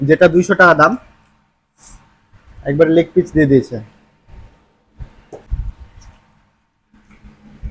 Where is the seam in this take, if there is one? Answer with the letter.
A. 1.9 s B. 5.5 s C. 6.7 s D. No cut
B